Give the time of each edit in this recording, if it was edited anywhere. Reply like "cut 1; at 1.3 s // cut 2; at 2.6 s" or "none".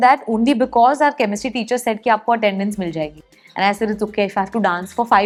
none